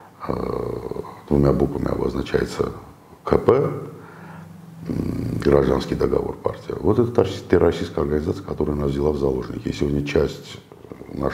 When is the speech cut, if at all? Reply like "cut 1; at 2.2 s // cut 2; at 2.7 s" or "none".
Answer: none